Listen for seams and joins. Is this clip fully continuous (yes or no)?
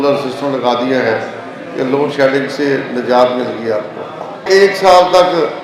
no